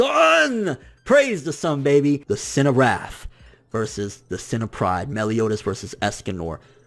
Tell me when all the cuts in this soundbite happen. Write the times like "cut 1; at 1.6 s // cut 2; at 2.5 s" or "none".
cut 1; at 2.2 s